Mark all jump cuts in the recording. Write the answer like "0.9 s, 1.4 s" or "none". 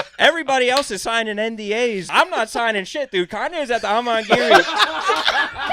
2.0 s